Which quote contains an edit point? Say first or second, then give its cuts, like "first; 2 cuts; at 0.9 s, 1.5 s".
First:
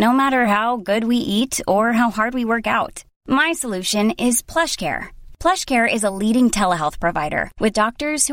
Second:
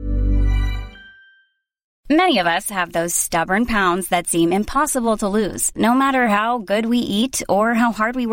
second; 1 cut; at 1.9 s